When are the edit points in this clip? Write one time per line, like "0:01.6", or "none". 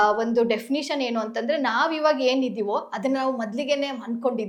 none